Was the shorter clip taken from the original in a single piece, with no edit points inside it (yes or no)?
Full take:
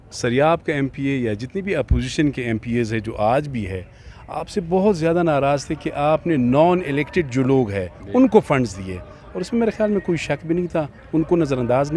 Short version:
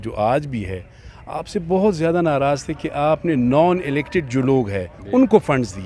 yes